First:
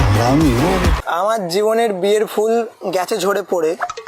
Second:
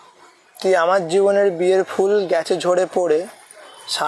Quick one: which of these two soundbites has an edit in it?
first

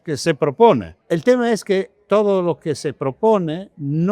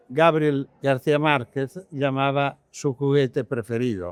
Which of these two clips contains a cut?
first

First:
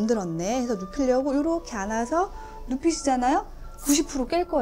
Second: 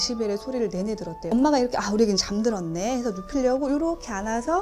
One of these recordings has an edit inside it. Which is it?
second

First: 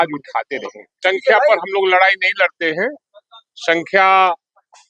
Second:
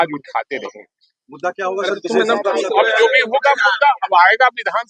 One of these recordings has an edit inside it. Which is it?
first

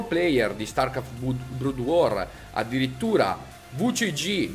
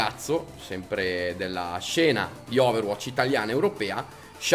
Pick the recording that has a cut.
second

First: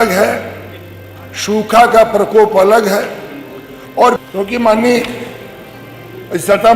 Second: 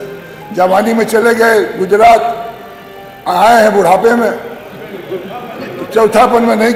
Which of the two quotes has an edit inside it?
first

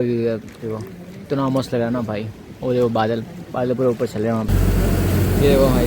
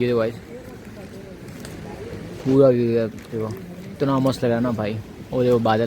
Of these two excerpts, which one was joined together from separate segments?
first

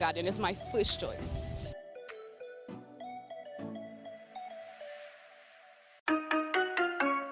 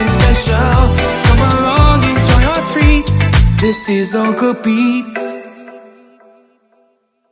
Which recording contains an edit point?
first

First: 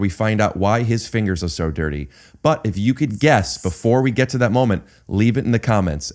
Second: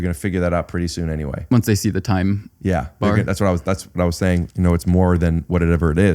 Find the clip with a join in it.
second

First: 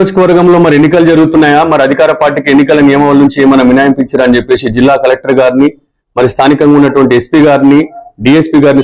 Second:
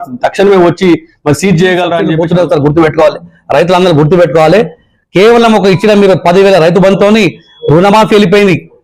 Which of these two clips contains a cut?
second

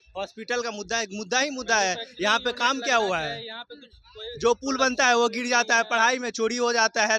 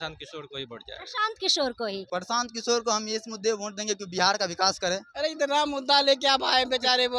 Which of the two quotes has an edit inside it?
second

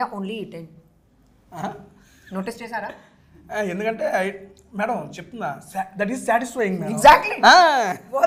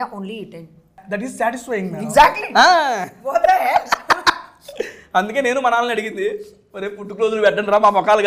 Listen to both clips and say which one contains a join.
second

